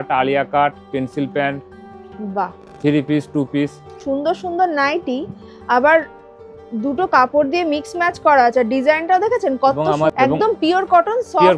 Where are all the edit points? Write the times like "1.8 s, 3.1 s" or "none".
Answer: 4.0 s, 10.1 s

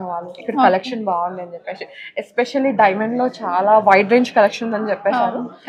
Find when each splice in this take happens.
none

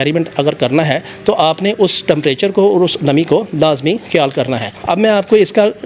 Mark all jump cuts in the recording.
none

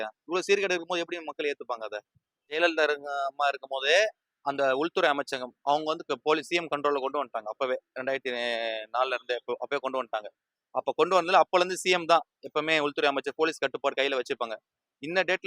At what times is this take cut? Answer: 2.6 s

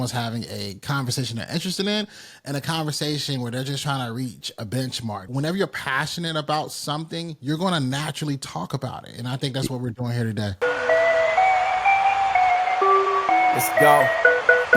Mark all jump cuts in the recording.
5.3 s, 10.5 s

